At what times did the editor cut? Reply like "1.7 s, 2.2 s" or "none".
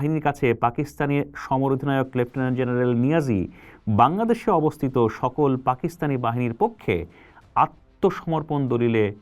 none